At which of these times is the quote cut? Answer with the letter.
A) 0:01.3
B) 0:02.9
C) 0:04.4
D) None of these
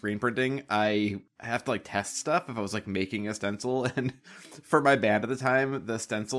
A